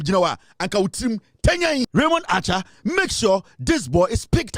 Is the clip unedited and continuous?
no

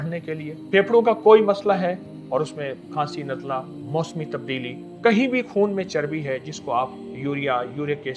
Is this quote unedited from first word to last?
no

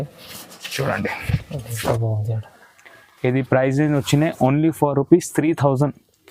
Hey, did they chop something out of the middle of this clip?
no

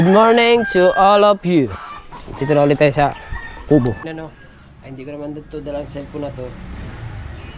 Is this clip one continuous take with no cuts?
no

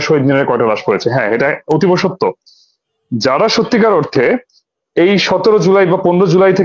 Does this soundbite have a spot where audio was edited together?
no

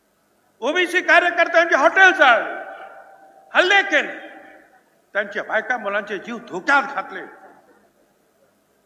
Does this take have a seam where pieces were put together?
no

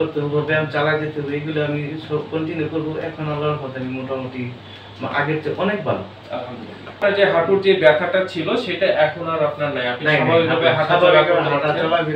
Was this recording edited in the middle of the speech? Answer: yes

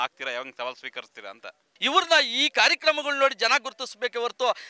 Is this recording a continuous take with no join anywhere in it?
no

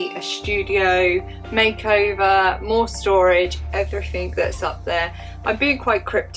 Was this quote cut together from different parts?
no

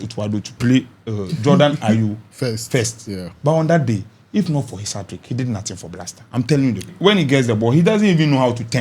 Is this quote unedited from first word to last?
no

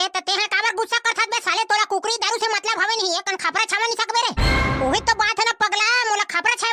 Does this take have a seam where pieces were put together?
no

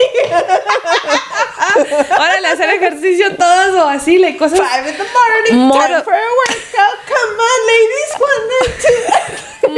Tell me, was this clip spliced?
no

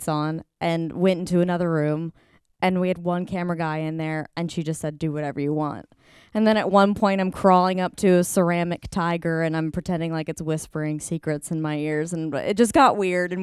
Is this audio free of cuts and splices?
yes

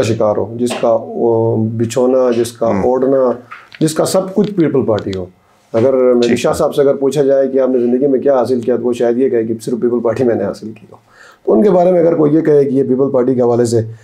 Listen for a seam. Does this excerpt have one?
no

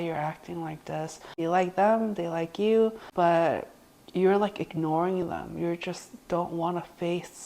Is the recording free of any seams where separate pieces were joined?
no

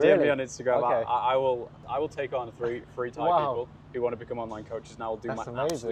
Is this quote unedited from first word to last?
yes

